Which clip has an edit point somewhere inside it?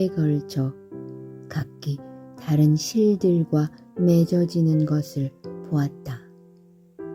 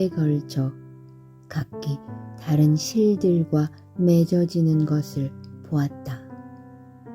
second; 1 cut; at 5.9 s

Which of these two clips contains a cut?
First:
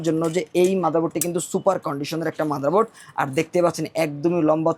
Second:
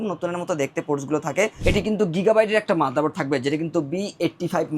second; 1 cut; at 1.6 s

